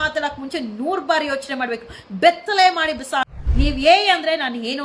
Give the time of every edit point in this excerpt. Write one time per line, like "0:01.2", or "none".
0:03.4